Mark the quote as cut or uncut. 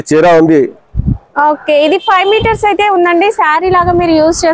uncut